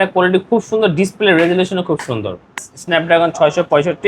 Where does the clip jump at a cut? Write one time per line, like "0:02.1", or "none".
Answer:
0:02.7